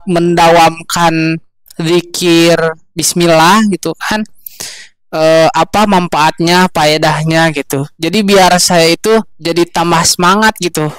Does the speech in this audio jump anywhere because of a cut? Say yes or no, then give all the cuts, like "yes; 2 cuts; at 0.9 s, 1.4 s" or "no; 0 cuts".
no; 0 cuts